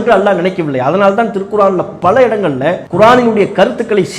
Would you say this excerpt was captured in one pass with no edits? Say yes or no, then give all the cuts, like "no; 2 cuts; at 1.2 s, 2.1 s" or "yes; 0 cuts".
no; 1 cut; at 2.8 s